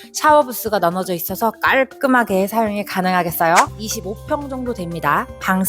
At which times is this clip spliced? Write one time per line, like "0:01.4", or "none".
0:03.8